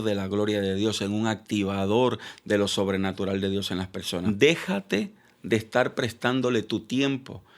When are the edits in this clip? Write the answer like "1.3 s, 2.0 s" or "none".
4.2 s